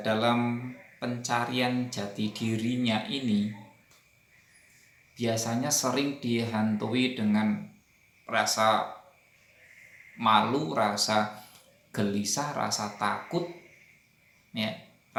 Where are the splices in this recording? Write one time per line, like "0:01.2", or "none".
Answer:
none